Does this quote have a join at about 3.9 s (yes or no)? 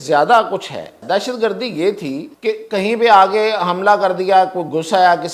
no